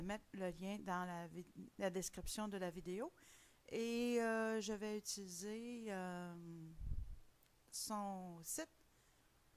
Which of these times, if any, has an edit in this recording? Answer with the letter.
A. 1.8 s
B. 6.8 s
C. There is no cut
B